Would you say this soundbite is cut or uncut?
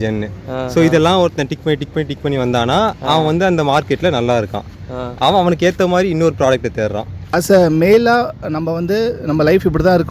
cut